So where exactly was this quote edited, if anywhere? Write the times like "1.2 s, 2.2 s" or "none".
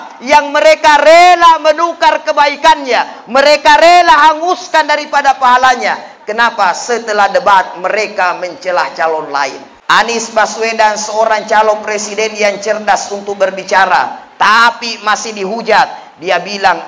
9.7 s